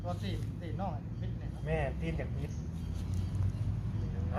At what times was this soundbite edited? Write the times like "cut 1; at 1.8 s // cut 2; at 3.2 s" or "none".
none

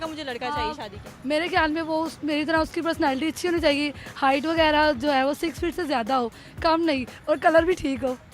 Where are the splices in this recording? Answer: none

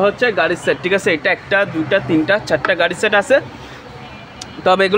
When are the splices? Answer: none

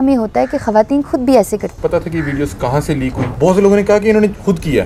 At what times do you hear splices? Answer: cut 1; at 1.7 s // cut 2; at 3.2 s

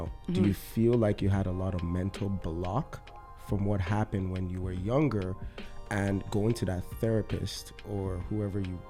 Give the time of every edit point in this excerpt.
none

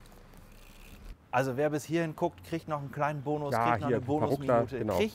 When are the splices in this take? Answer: cut 1; at 1.0 s

